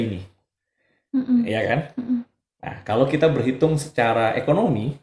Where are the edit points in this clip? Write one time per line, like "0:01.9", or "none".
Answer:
none